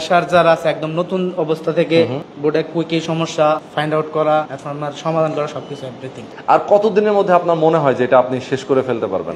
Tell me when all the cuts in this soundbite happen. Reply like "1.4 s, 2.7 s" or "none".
2.2 s, 3.7 s, 4.6 s, 6.3 s